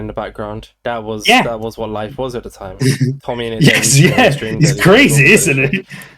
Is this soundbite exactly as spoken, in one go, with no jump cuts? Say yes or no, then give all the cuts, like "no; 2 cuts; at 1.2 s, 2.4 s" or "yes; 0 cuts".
yes; 0 cuts